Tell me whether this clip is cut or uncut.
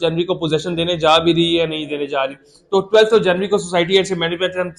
uncut